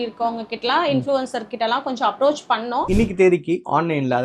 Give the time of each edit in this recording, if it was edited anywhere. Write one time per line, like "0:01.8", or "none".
0:02.9